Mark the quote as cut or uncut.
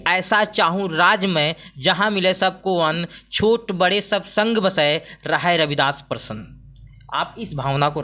uncut